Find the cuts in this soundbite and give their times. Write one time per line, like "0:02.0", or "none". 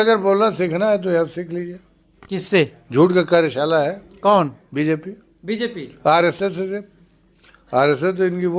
none